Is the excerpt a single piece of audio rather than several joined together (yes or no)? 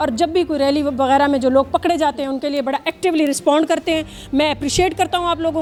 yes